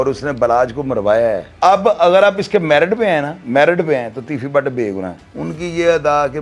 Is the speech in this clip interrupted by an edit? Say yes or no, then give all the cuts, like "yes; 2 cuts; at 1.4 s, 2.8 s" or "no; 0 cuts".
yes; 2 cuts; at 1.5 s, 5.2 s